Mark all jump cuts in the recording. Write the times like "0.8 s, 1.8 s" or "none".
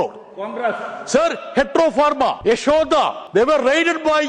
2.4 s, 3.2 s